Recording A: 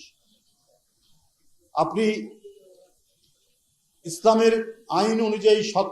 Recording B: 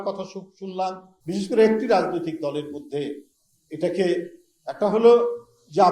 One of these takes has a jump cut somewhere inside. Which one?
B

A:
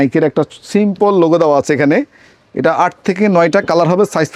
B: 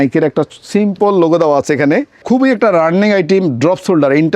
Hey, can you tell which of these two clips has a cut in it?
B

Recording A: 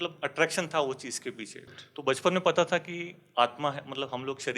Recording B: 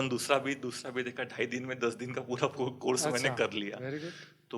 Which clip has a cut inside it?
A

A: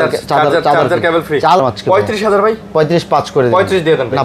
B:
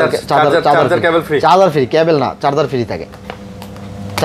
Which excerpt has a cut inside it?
A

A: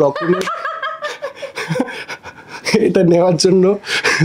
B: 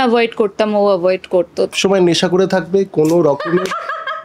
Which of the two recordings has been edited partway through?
B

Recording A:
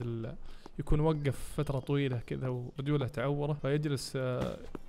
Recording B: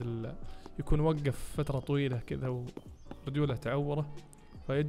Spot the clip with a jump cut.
A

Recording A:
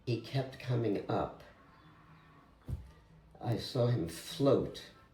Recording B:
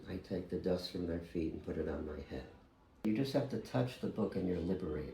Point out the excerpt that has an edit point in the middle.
B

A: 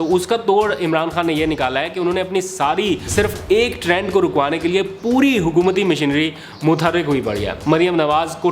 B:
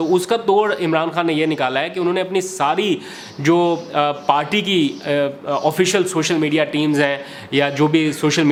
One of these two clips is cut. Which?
A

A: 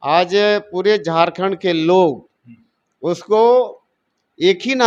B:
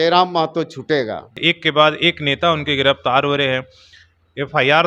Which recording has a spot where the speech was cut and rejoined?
B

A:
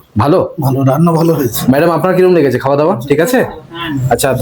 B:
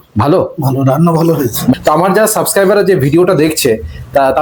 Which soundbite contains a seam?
B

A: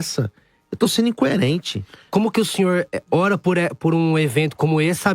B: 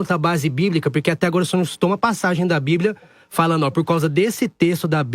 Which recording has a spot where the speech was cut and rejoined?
A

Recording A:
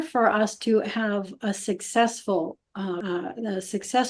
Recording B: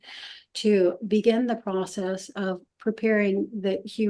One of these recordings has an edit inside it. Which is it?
A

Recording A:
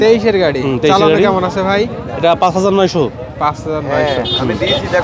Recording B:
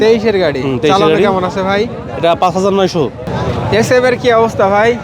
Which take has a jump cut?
B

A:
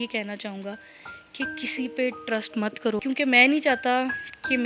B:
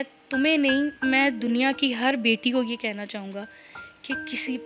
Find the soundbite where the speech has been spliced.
A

